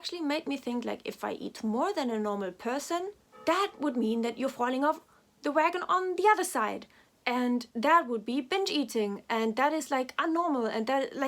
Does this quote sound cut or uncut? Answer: cut